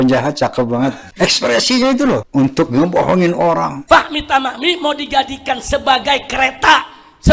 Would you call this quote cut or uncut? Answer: cut